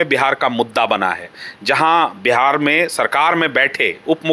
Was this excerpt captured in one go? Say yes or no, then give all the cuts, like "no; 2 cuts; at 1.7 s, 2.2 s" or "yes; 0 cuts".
yes; 0 cuts